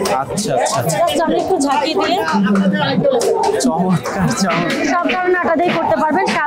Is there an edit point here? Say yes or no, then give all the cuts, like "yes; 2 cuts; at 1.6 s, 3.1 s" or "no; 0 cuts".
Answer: no; 0 cuts